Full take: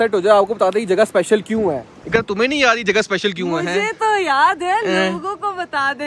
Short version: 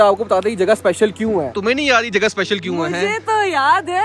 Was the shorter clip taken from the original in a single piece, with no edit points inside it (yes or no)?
no